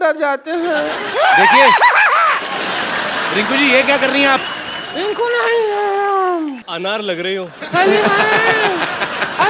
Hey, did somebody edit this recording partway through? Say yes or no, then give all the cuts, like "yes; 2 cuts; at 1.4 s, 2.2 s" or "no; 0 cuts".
yes; 2 cuts; at 1.1 s, 6.7 s